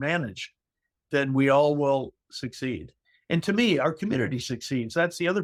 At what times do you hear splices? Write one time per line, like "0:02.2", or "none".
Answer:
none